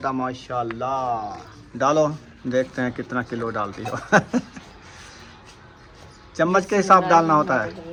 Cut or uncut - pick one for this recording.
uncut